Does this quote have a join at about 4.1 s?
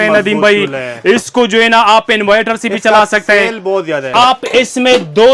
yes; 1 cut; at 4.1 s

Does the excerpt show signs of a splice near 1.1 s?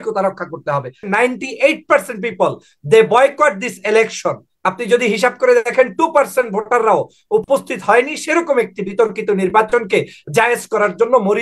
yes; 1 cut; at 1.1 s

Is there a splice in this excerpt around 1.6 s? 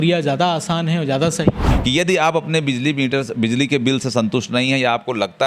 yes; 1 cut; at 1.6 s

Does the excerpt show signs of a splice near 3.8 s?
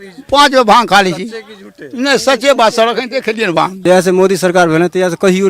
yes; 1 cut; at 3.8 s

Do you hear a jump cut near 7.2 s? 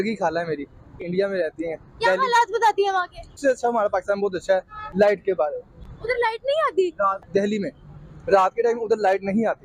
yes; 3 cuts; at 1.0 s, 3.4 s, 7.2 s

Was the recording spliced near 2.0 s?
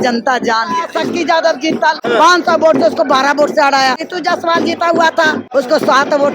yes; 4 cuts; at 0.9 s, 2.0 s, 4.1 s, 5.4 s

